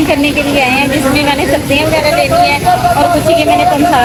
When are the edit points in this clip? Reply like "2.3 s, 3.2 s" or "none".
none